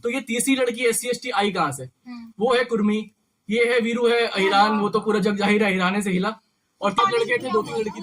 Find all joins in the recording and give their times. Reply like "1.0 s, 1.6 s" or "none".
7.0 s